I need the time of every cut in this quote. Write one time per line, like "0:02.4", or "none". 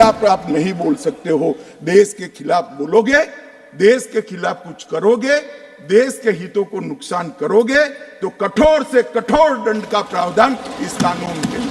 none